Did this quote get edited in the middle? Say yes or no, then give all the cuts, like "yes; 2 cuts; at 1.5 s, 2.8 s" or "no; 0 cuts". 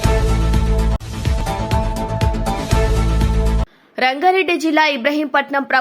yes; 2 cuts; at 1.0 s, 3.7 s